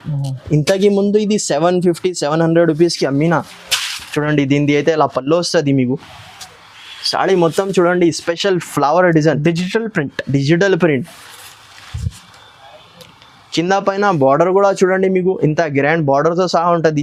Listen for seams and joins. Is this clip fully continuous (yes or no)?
yes